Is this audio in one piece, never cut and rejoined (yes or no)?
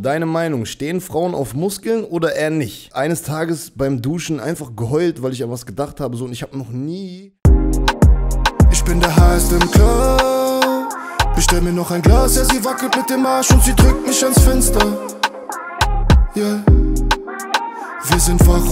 no